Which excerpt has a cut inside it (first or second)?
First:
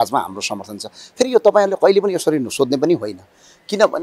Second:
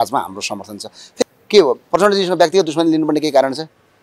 second